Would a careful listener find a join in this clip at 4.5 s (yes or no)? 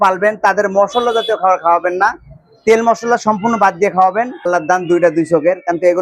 yes